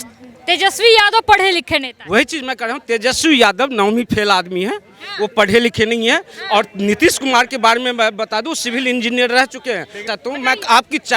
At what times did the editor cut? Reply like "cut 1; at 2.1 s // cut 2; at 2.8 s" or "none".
cut 1; at 10.0 s